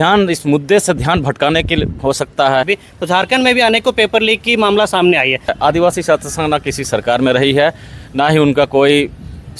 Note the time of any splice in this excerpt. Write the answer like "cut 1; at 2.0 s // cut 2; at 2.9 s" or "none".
cut 1; at 2.7 s // cut 2; at 5.5 s